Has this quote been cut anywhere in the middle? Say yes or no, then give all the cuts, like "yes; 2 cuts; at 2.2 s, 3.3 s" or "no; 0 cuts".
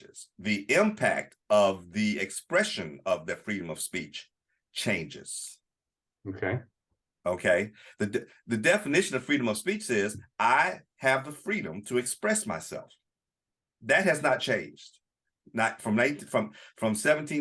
no; 0 cuts